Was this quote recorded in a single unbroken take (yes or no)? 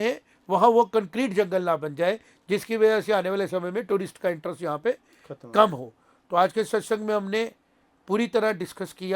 yes